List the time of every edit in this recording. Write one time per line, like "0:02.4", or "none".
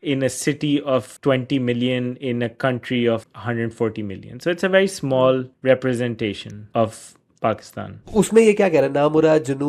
0:01.1
0:03.3
0:05.5
0:06.5
0:08.0